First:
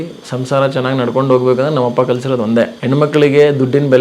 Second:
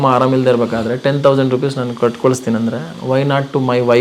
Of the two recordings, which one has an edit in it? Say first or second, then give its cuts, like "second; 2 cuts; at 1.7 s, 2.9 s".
first; 1 cut; at 2.8 s